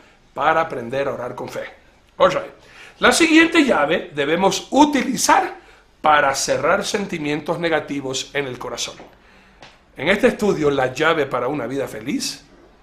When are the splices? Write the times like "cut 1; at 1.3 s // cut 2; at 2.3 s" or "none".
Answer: cut 1; at 7.2 s